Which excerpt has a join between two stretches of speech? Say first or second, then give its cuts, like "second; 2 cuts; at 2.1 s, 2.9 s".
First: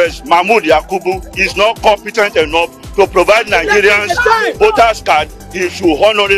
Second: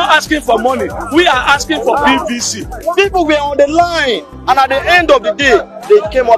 second; 1 cut; at 2.8 s